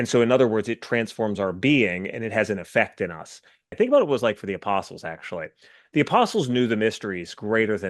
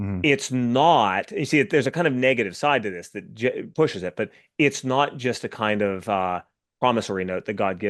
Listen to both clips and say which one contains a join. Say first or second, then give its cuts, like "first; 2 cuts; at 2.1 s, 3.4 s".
first; 1 cut; at 3.7 s